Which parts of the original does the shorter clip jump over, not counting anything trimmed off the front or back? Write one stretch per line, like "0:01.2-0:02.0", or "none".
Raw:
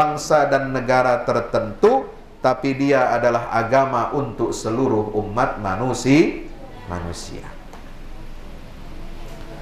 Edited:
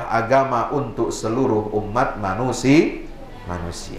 none